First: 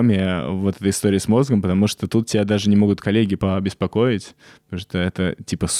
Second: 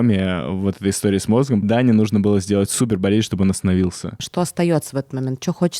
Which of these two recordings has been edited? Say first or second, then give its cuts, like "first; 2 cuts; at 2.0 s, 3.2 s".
second; 2 cuts; at 1.6 s, 4.1 s